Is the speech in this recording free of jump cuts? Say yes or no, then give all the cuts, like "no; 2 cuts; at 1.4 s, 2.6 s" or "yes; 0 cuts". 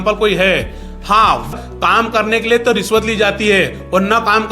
no; 1 cut; at 1.5 s